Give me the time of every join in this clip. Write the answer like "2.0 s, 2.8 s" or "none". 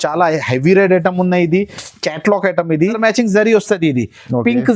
3.0 s